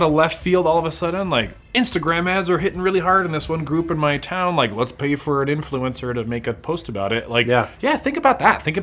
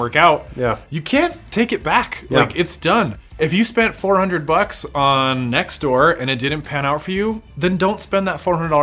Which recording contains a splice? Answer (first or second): second